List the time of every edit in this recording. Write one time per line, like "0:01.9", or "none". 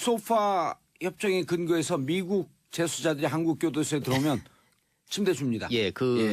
none